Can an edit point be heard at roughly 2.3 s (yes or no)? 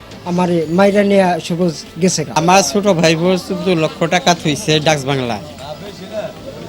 yes